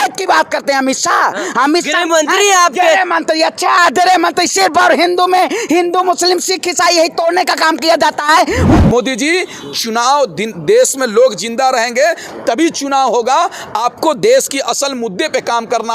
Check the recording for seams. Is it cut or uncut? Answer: cut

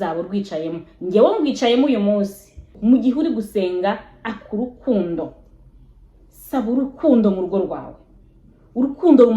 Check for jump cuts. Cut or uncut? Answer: cut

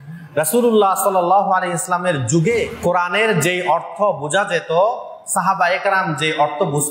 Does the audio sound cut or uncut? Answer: cut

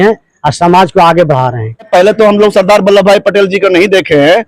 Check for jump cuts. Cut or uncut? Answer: cut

